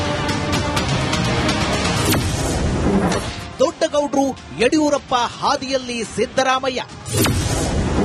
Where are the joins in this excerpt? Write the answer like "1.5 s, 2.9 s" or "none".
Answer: 2.0 s